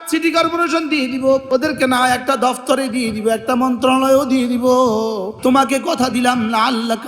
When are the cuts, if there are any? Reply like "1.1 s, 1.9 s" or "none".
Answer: 1.4 s, 5.3 s